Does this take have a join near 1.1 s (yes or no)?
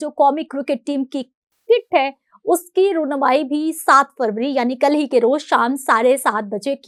no